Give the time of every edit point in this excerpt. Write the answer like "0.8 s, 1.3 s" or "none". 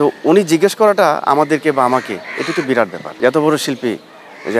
3.0 s